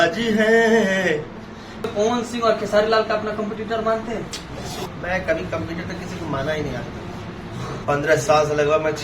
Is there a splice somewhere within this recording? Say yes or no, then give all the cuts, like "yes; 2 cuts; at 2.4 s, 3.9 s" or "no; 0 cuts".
yes; 3 cuts; at 1.8 s, 4.8 s, 7.8 s